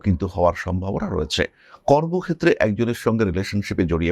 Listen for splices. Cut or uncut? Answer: uncut